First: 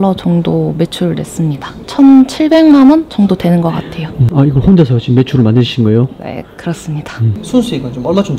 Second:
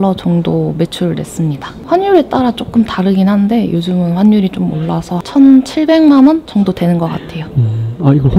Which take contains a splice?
first; 3 cuts; at 1.8 s, 4.1 s, 7.4 s

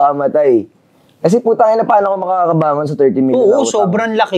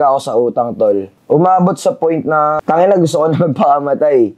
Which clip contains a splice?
second; 2 cuts; at 1.1 s, 2.6 s

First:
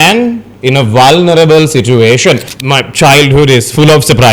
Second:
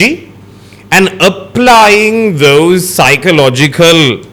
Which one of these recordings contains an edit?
first; 1 cut; at 2.5 s

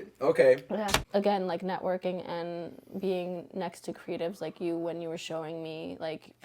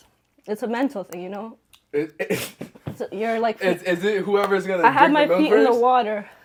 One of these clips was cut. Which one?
first; 1 cut; at 1.0 s

